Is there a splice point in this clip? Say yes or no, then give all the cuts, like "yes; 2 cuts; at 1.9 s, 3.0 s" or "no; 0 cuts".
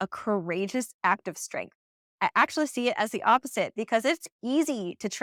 no; 0 cuts